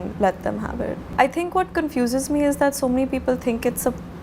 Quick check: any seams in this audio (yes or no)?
yes